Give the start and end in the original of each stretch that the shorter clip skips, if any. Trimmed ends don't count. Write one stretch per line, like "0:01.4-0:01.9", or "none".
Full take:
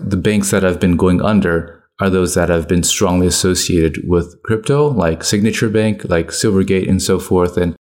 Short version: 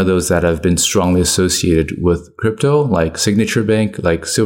none